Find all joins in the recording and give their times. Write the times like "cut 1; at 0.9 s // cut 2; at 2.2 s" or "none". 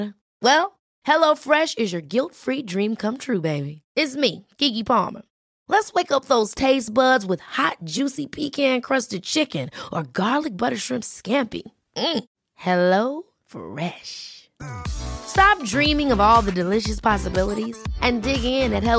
none